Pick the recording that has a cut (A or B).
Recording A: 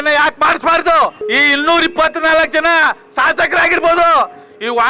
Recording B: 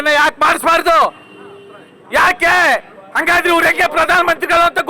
A